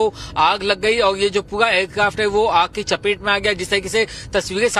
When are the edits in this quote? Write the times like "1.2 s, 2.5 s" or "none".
none